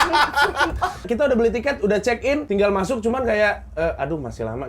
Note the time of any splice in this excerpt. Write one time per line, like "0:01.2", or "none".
0:01.1
0:02.4